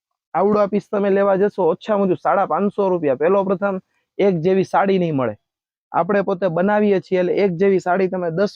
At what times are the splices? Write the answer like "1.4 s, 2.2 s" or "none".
none